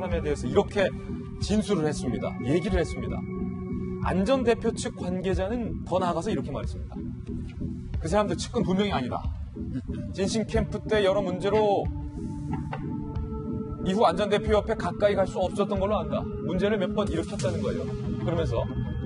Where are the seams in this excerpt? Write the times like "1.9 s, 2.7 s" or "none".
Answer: 16.8 s